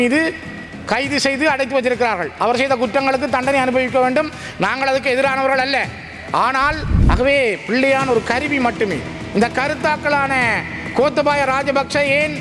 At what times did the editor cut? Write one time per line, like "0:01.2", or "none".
0:06.9